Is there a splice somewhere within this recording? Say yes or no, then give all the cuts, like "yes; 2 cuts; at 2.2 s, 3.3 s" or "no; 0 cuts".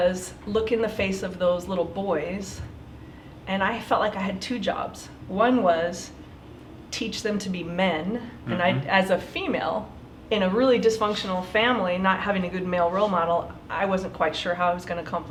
no; 0 cuts